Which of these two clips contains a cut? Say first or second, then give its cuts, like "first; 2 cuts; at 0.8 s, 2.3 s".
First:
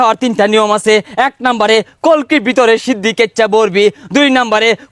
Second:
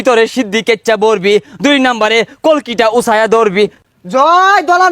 second; 1 cut; at 3.8 s